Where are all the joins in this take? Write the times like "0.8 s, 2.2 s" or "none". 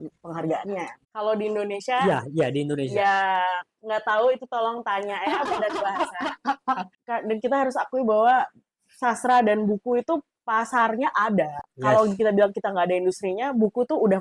1.0 s, 6.9 s